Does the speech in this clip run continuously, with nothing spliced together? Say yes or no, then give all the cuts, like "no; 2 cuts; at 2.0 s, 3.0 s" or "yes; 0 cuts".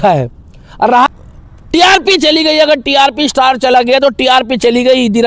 no; 1 cut; at 1.1 s